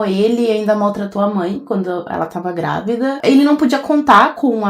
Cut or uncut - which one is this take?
cut